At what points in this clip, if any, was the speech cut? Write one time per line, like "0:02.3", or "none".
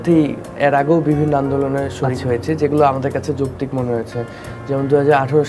none

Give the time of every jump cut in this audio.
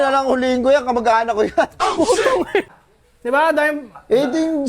0:02.7

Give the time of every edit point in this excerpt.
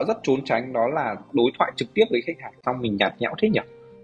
0:02.6

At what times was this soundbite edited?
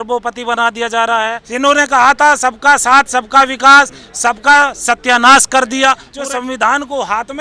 0:01.4
0:06.1

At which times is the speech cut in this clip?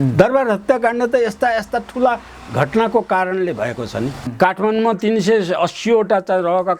0:04.2

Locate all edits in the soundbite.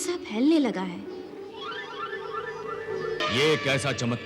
0:03.2

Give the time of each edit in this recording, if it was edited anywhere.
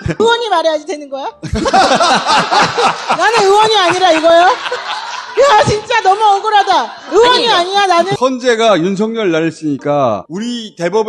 0:08.1

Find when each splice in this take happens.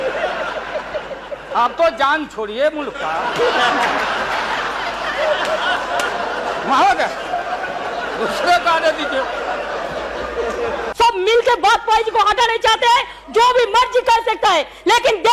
0:10.8

